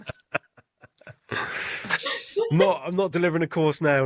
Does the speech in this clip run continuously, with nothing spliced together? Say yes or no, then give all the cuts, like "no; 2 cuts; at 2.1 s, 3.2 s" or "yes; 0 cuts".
yes; 0 cuts